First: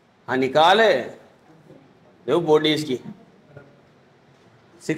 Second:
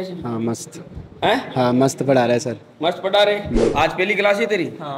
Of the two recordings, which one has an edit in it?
second; 1 cut; at 3.7 s

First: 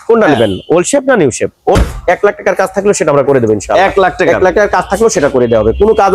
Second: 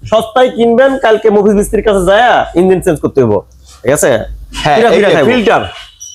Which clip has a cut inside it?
first; 1 cut; at 1.8 s

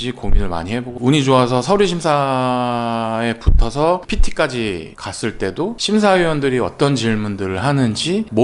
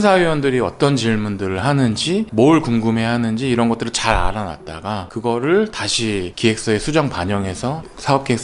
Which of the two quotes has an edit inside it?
first; 1 cut; at 0.9 s

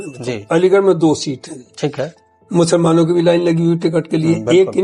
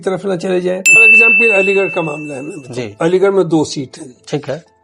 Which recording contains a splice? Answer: second; 1 cut; at 1.0 s

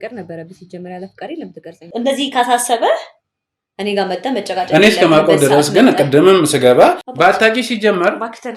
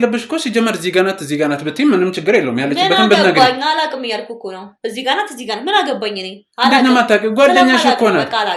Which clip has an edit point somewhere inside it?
first; 2 cuts; at 1.7 s, 7.1 s

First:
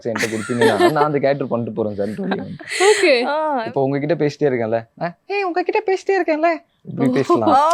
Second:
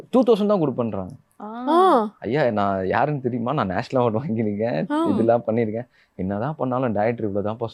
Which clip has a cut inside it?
first; 1 cut; at 3.6 s

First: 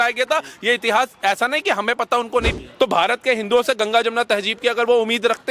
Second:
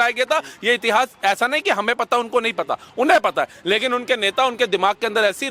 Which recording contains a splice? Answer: first; 1 cut; at 2.5 s

